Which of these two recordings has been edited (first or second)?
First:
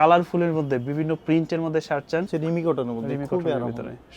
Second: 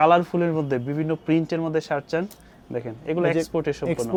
first